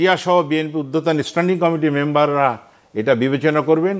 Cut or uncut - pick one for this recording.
uncut